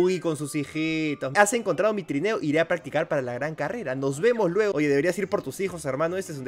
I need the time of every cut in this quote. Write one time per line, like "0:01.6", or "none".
0:01.3
0:04.7